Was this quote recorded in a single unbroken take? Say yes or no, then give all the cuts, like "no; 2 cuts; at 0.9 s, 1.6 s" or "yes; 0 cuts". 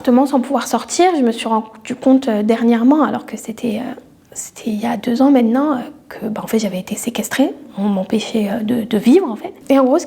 yes; 0 cuts